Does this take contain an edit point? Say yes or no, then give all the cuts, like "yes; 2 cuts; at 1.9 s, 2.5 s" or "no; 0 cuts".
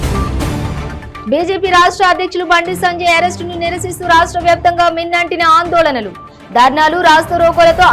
yes; 1 cut; at 1.0 s